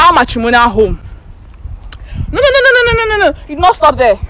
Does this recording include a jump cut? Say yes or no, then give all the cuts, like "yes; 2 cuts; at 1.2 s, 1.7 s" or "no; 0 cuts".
no; 0 cuts